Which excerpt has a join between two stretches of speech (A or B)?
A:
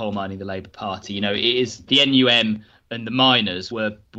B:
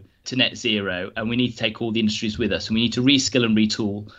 A